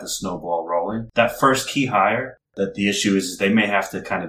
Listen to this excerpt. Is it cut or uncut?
cut